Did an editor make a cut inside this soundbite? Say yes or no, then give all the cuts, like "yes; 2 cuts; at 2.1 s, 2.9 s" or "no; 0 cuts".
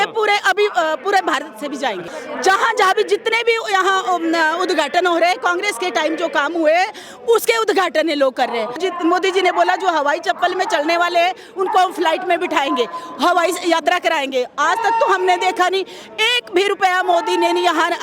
yes; 2 cuts; at 2.1 s, 8.8 s